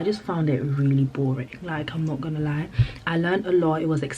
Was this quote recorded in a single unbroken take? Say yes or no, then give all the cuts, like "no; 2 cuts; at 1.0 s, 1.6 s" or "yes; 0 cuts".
yes; 0 cuts